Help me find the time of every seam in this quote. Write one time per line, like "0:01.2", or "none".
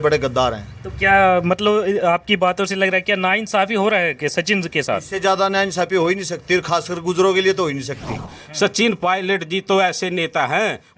0:08.3